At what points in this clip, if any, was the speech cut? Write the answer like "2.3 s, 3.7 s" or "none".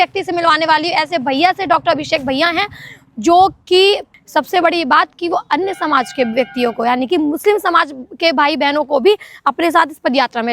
4.1 s